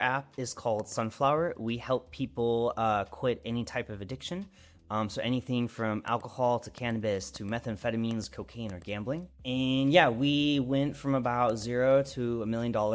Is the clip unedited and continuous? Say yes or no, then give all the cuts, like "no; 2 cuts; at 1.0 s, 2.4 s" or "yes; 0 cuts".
yes; 0 cuts